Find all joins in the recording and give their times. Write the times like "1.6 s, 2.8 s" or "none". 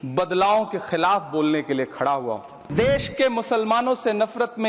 2.5 s